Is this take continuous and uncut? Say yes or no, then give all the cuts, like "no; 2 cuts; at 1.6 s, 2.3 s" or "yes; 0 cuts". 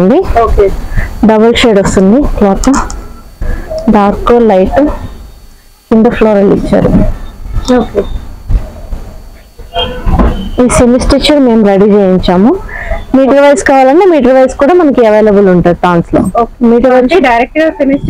yes; 0 cuts